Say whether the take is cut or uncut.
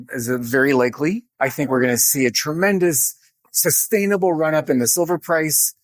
cut